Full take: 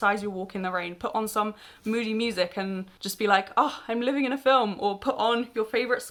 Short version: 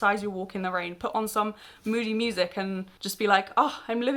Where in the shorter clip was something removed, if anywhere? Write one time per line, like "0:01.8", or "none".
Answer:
none